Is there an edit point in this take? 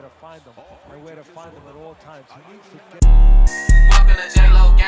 yes; 1 cut; at 2.9 s

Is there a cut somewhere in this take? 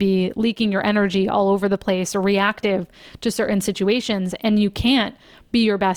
no; 0 cuts

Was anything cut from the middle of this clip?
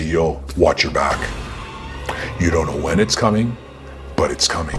no; 0 cuts

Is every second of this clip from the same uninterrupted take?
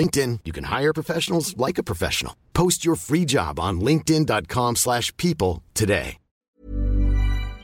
no; 1 cut; at 6.6 s

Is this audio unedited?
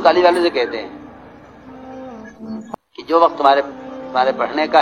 yes; 0 cuts

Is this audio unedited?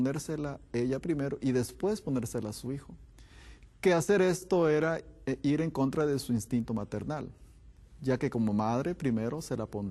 no; 1 cut; at 6.1 s

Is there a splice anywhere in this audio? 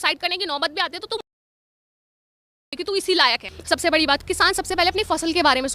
yes; 1 cut; at 3.5 s

